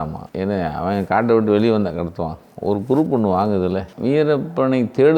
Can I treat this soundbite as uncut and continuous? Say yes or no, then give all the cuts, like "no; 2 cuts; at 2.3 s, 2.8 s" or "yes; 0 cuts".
no; 1 cut; at 3.9 s